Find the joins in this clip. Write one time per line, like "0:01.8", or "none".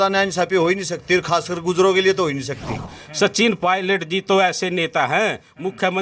0:02.9